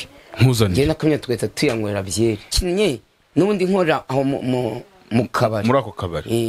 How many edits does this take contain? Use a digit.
1